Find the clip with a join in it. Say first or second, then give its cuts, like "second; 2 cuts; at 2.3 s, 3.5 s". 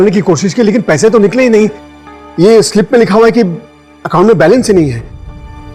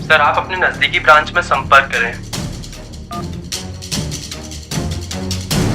second; 1 cut; at 1.9 s